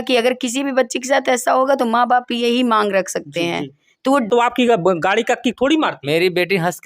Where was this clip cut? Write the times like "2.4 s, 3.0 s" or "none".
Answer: 4.3 s